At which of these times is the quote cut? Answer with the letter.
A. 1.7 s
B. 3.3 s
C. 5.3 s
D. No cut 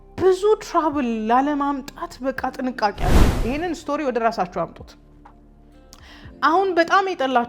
B